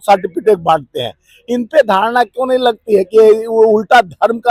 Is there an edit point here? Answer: no; 0 cuts

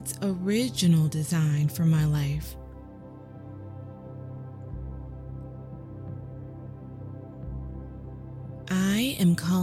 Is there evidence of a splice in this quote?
yes; 4 cuts; at 2.5 s, 3.8 s, 5.0 s, 8.6 s

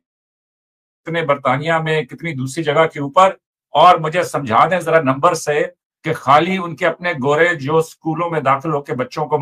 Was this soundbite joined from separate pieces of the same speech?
no; 0 cuts

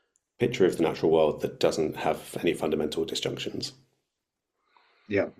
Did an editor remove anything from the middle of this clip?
no; 0 cuts

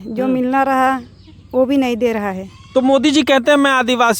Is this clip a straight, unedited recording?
yes; 0 cuts

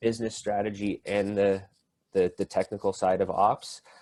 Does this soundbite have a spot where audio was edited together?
no; 0 cuts

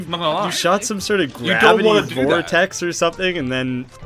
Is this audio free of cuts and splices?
yes; 0 cuts

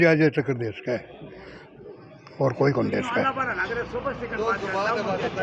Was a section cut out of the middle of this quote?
no; 0 cuts

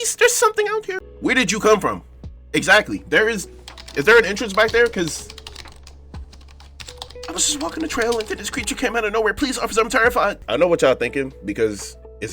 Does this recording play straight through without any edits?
no; 1 cut; at 1.0 s

